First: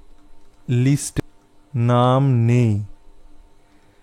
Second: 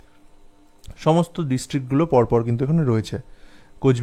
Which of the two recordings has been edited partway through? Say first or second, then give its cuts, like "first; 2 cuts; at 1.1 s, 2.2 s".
first; 1 cut; at 1.2 s